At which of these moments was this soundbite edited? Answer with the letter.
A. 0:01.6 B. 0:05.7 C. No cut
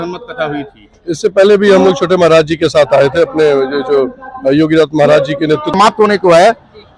B